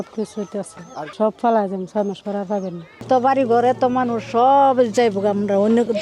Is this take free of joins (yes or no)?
no